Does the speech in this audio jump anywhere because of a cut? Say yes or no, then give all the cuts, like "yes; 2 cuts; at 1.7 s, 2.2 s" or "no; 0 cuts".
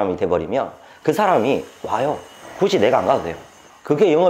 no; 0 cuts